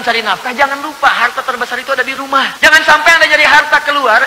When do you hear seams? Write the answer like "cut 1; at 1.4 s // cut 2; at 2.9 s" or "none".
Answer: cut 1; at 2.5 s